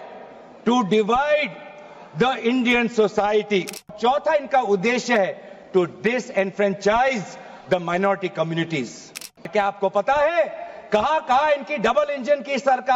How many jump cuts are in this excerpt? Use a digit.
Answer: 2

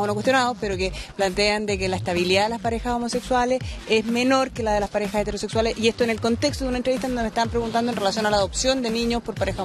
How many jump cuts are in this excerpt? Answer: 1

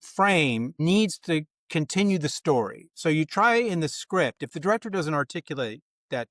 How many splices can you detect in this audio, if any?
0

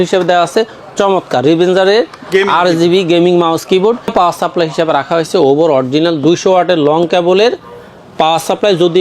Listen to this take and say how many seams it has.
1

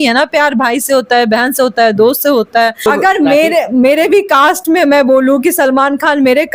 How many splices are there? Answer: 1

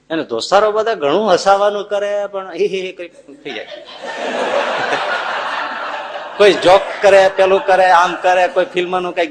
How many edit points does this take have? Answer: 0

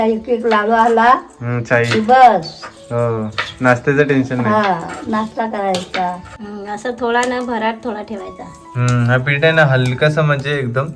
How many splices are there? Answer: 1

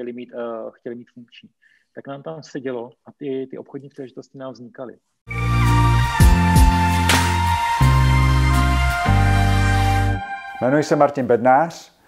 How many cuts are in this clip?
1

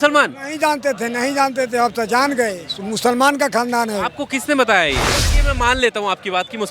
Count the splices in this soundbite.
1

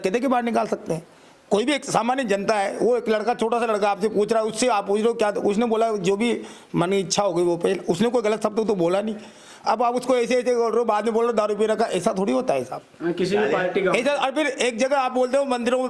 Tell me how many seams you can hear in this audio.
0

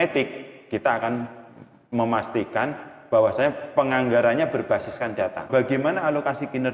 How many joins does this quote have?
1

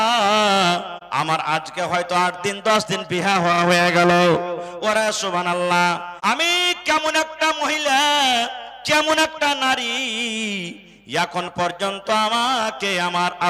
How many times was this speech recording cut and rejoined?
2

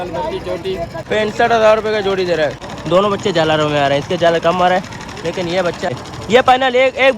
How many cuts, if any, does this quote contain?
3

